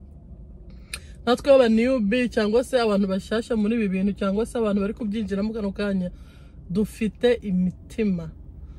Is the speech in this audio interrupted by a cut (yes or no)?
no